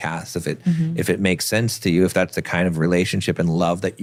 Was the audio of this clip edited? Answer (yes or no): no